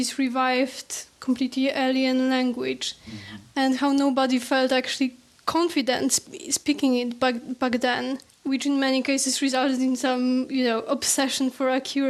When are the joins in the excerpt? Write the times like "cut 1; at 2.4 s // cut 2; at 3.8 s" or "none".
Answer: none